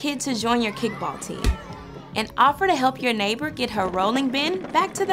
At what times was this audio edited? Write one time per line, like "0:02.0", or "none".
none